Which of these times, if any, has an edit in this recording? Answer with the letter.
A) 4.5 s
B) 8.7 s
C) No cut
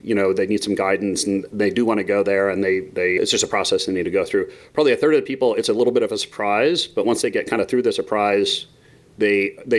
C